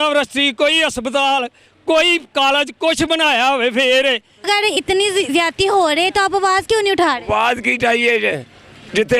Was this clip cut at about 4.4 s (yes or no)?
yes